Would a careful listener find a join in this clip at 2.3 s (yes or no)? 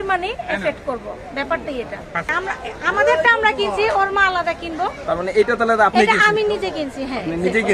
yes